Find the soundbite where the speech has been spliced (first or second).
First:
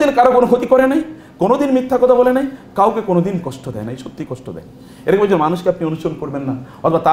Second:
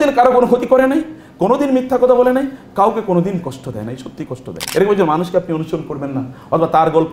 second